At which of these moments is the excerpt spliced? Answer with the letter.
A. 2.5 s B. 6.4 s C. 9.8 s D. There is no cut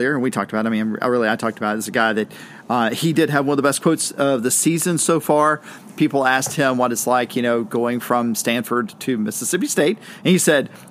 D